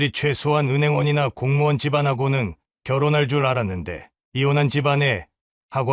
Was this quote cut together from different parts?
no; 0 cuts

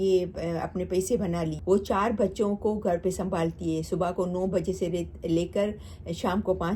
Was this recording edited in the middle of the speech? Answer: yes; 1 cut; at 1.5 s

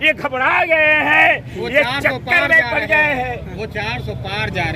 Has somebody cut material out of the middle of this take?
no; 0 cuts

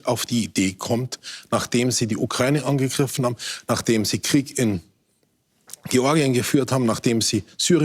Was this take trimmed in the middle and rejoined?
no; 0 cuts

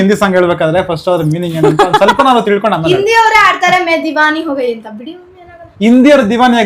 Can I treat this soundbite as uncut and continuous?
yes; 0 cuts

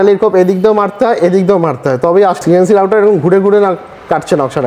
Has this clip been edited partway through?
yes; 1 cut; at 2.4 s

